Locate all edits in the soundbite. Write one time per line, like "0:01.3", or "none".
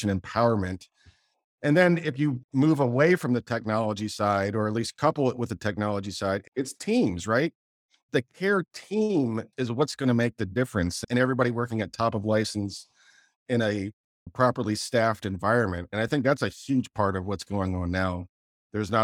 0:02.4
0:06.4
0:08.0
0:11.0